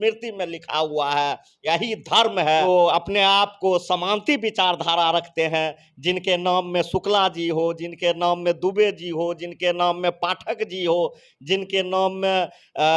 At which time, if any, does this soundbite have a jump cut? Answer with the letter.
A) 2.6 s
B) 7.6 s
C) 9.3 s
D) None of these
A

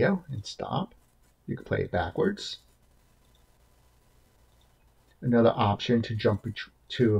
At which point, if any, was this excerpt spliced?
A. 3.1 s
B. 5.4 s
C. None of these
C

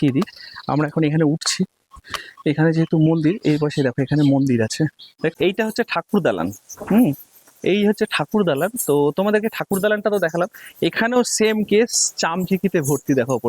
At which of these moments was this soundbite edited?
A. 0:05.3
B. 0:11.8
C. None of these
A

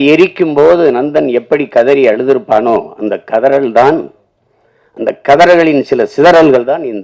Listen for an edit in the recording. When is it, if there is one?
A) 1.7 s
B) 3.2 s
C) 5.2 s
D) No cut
D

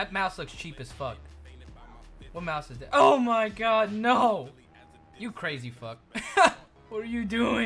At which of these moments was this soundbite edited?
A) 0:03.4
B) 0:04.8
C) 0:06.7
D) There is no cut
C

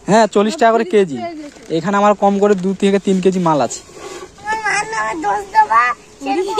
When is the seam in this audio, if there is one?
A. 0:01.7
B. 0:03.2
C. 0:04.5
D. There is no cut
C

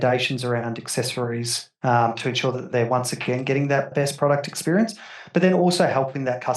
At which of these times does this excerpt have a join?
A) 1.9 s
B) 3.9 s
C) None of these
B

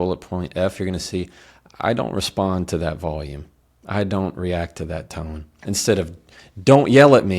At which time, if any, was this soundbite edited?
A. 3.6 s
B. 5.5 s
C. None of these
B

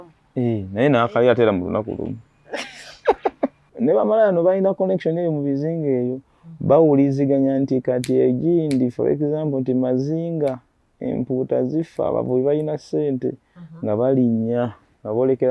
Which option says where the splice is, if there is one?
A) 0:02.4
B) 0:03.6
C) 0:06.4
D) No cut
B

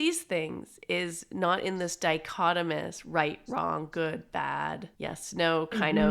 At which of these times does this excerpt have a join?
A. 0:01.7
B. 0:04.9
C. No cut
B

